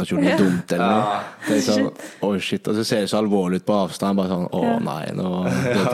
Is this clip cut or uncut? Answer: uncut